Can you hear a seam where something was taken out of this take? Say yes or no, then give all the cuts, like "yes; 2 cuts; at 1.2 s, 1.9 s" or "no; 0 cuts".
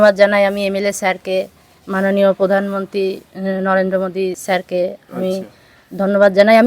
yes; 1 cut; at 4.4 s